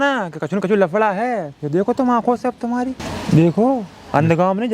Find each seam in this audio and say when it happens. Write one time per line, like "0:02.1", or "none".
0:03.1

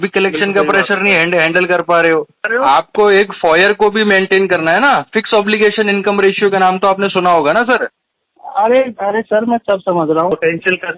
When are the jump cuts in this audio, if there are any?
0:02.5
0:10.3

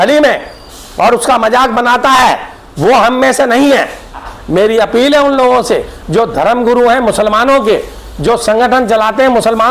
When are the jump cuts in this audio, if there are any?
0:04.3

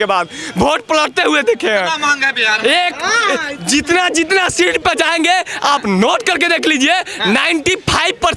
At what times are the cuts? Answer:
none

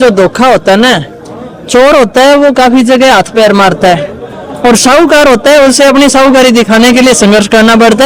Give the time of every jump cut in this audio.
none

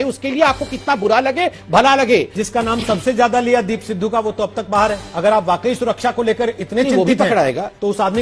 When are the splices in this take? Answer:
0:02.4
0:05.1

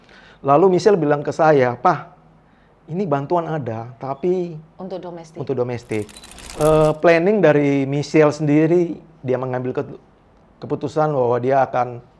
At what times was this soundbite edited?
0:06.5

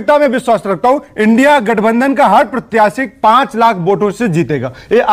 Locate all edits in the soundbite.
none

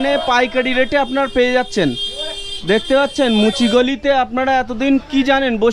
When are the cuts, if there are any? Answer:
none

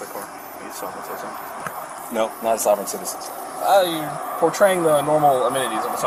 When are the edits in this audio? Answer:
none

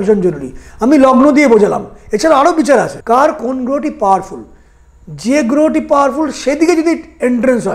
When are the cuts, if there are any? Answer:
0:03.0

